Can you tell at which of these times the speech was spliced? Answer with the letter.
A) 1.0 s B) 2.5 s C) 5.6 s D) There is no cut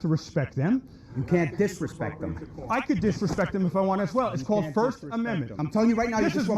C